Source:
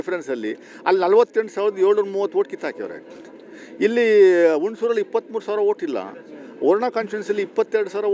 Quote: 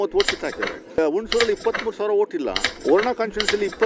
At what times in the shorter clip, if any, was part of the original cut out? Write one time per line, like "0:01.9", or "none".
0:01.0
0:02.7